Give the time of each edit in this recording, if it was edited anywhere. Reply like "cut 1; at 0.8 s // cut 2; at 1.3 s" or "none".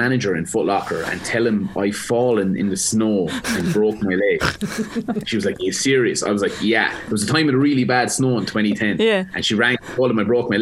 cut 1; at 5.3 s